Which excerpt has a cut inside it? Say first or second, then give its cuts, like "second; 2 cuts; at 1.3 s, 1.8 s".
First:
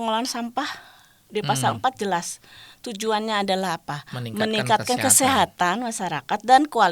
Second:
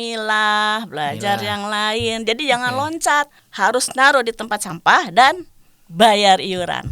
second; 1 cut; at 3.4 s